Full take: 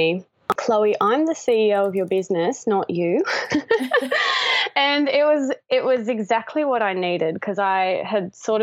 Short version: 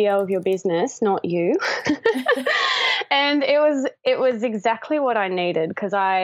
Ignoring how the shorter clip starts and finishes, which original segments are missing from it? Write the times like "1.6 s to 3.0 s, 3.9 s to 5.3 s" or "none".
none